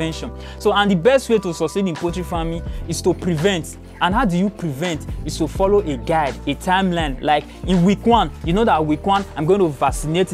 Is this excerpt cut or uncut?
uncut